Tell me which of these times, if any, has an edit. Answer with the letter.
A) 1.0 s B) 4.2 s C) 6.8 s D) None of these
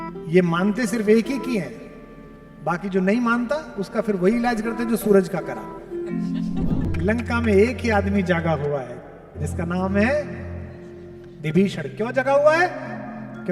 C